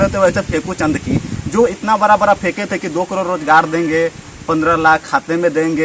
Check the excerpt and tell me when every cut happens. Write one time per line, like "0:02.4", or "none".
none